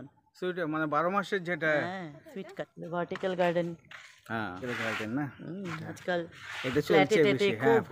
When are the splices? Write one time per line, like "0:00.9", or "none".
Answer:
0:02.7
0:04.6